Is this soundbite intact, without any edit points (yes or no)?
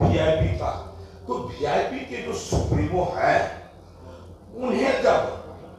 yes